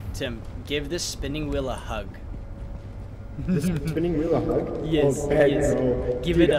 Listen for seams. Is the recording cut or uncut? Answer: uncut